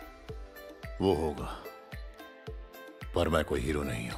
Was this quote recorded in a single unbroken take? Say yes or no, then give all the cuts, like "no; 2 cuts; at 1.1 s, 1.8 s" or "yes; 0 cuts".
yes; 0 cuts